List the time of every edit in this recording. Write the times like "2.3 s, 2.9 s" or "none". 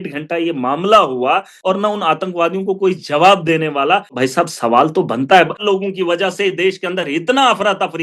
1.5 s, 4.1 s, 5.6 s